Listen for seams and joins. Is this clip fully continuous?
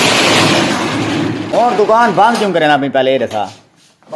no; 1 cut; at 1.6 s

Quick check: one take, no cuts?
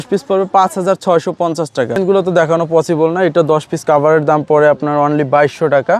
no; 1 cut; at 2.0 s

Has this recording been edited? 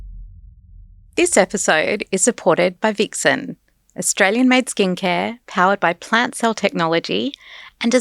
yes; 1 cut; at 1.0 s

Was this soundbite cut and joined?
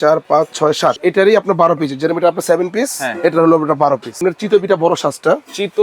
yes; 2 cuts; at 1.0 s, 4.2 s

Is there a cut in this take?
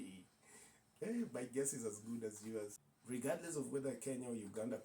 yes; 1 cut; at 2.9 s

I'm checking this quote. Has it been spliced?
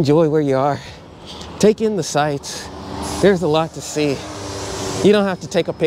no; 0 cuts

